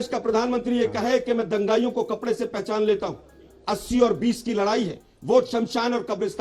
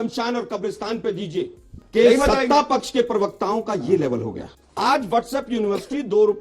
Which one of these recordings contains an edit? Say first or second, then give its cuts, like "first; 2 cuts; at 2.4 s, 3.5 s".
second; 2 cuts; at 1.8 s, 4.5 s